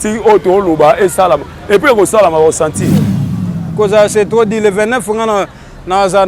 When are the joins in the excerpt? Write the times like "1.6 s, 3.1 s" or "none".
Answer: 3.1 s